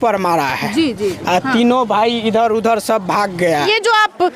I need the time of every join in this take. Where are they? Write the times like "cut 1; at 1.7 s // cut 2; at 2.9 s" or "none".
none